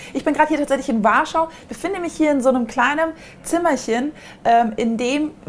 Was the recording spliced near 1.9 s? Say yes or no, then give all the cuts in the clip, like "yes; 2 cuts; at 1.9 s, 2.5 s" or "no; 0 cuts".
no; 0 cuts